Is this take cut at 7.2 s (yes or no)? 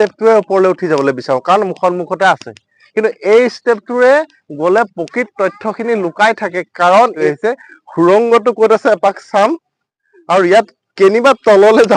yes